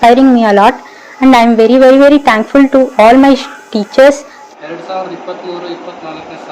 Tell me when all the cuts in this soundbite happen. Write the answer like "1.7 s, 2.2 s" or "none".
4.4 s